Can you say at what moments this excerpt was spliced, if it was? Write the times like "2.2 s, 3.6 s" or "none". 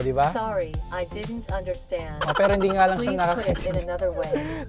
none